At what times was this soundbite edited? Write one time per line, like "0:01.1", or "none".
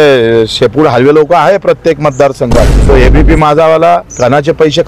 0:02.7